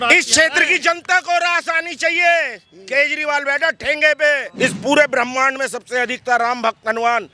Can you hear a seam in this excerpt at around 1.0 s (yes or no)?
no